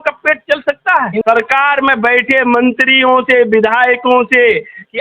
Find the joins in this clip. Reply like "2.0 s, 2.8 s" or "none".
1.2 s